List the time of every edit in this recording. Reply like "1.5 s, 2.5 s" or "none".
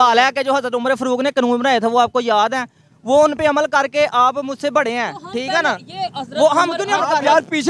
none